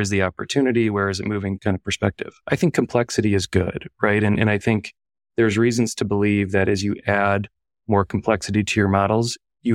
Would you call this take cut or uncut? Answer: uncut